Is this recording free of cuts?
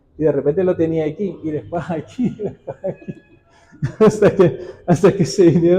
yes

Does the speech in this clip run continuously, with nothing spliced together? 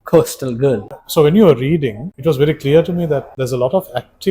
no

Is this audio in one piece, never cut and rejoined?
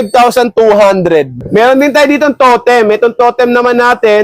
no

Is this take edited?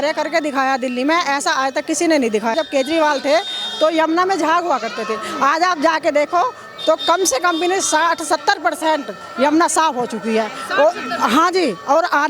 yes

